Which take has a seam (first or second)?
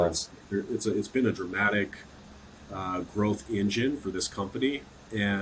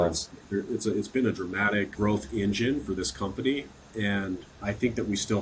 second